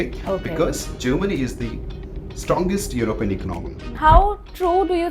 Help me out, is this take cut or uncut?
cut